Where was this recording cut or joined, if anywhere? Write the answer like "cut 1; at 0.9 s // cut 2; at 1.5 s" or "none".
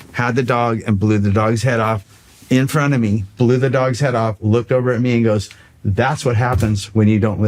none

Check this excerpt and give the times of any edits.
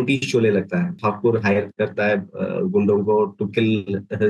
cut 1; at 1.0 s

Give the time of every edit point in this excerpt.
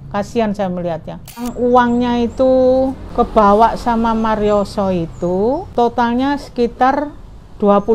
cut 1; at 1.5 s // cut 2; at 3.0 s // cut 3; at 5.7 s

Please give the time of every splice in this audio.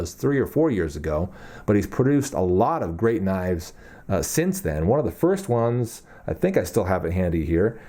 none

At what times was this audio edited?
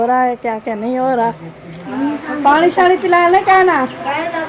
cut 1; at 1.8 s

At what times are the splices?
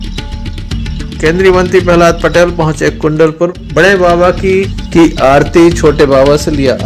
cut 1; at 1.1 s

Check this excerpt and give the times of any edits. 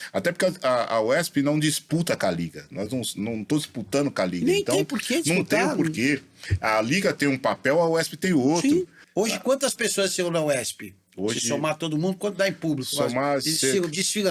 cut 1; at 9.0 s

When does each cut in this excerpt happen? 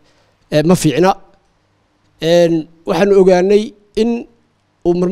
none

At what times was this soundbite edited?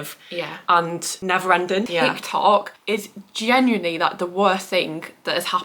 cut 1; at 1.9 s

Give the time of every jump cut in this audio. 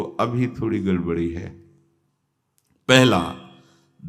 none

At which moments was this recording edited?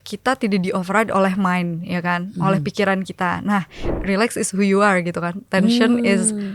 cut 1; at 3.9 s

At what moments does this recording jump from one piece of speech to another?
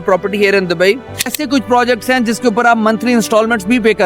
cut 1; at 1.3 s

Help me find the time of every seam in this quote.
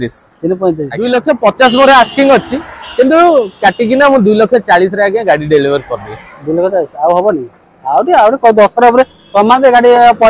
cut 1; at 0.9 s

